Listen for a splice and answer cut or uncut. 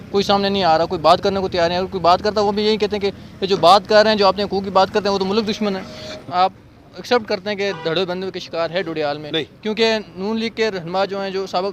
cut